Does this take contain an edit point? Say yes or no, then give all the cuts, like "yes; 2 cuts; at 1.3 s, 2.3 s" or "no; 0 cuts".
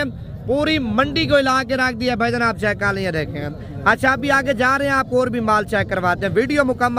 no; 0 cuts